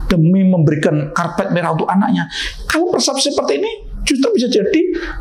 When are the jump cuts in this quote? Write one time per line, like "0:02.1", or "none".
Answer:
none